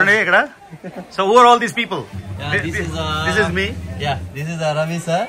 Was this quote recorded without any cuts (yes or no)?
yes